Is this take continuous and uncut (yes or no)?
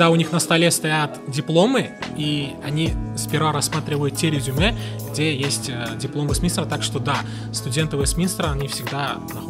yes